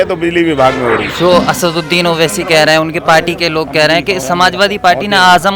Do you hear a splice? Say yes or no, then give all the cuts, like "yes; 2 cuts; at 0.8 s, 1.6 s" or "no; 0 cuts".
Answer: yes; 1 cut; at 1.1 s